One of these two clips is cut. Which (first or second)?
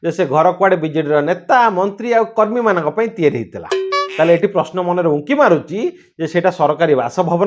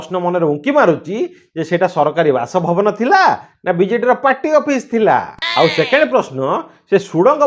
second